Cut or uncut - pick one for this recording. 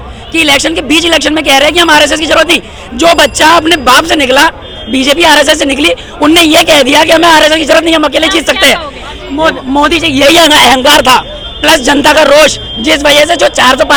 uncut